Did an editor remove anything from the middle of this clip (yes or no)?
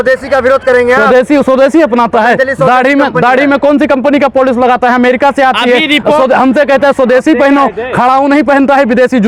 no